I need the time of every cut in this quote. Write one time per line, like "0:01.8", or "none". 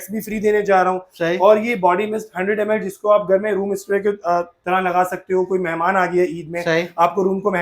none